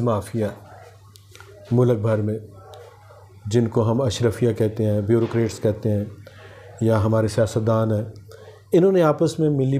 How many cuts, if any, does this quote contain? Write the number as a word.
zero